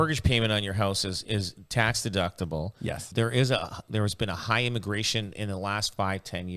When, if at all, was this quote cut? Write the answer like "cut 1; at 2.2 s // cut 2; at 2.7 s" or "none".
cut 1; at 3.0 s